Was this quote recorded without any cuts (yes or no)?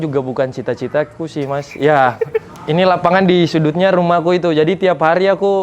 no